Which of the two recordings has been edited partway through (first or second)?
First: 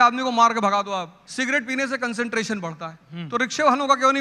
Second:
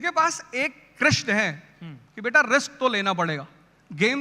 first